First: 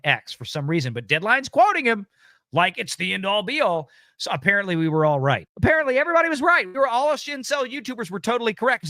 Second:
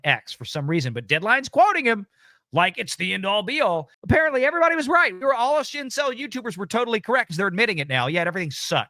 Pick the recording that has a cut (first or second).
second